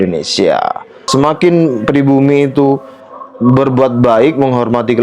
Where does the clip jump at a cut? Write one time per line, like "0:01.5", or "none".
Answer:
0:01.0